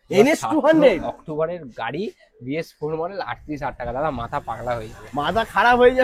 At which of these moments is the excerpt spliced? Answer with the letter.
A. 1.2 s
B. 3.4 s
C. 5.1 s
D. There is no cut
D